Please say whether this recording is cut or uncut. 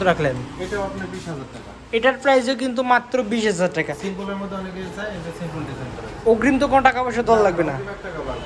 uncut